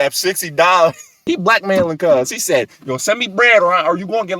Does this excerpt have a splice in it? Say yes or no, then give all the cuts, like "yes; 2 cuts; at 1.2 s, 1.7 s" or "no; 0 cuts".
yes; 1 cut; at 1.2 s